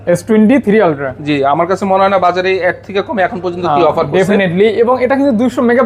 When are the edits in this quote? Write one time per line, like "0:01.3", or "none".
none